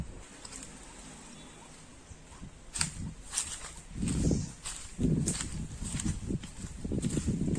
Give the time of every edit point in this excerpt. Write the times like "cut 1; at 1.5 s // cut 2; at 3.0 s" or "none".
none